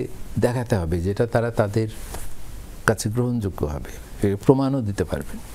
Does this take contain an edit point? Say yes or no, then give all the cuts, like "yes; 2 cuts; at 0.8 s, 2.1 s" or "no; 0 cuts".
no; 0 cuts